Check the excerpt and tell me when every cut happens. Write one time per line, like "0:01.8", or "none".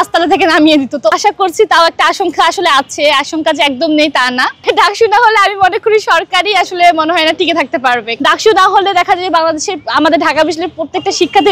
0:01.2
0:04.6
0:08.2